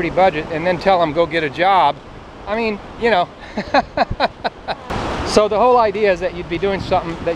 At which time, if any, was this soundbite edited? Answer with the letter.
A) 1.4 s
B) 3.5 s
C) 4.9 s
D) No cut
C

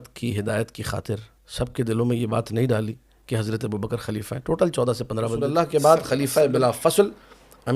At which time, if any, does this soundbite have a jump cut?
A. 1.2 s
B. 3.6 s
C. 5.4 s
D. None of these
C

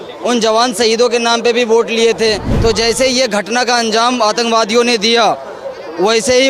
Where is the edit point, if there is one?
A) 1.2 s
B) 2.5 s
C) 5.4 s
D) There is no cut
B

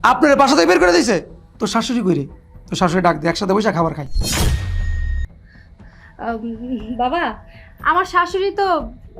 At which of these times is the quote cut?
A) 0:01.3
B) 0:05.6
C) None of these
A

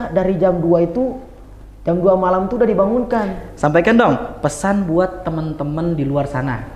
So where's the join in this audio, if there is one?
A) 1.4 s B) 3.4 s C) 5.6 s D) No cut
B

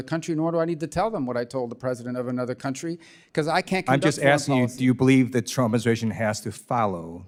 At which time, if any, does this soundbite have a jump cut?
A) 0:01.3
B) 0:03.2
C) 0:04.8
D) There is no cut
D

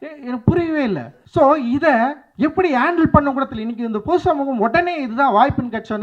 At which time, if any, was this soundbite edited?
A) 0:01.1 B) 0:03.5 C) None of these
A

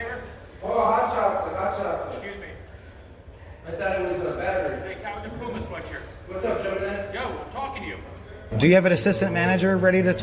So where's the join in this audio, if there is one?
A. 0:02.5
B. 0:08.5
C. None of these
B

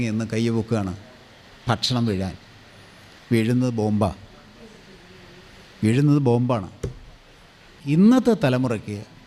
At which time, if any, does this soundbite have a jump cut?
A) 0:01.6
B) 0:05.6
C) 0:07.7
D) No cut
C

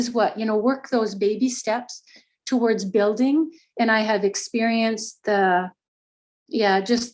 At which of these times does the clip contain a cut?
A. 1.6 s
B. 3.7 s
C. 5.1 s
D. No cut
D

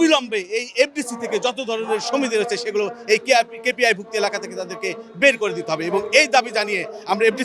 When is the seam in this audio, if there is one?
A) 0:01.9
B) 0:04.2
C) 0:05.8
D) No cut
D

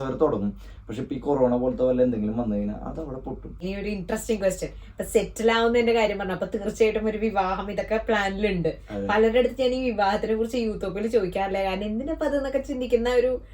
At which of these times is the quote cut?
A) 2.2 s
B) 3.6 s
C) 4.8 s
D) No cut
B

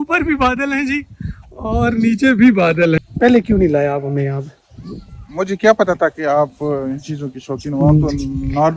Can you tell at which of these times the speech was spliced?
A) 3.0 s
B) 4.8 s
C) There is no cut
A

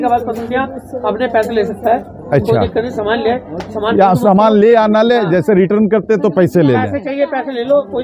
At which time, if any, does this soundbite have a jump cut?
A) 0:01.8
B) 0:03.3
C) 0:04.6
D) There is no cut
D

